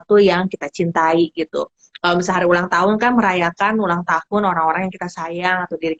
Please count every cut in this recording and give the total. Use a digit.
0